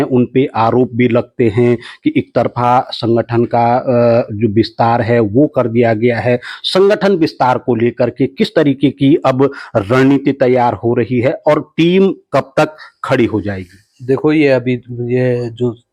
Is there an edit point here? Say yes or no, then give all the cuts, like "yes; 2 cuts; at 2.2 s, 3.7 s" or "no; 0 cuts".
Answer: no; 0 cuts